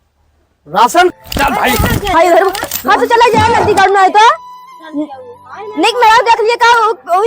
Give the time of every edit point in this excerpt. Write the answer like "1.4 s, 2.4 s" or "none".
1.1 s